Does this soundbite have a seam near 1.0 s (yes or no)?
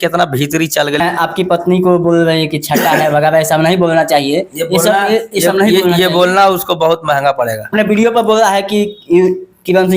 yes